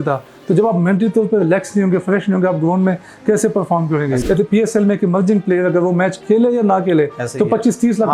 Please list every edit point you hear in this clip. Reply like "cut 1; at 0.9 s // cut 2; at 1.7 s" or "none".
cut 1; at 4.2 s